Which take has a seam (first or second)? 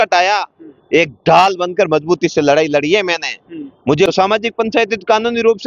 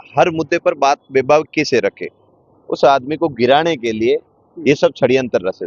first